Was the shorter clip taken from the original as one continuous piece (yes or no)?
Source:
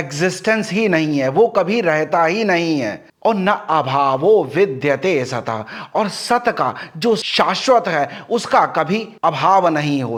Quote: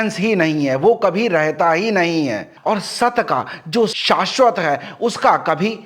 no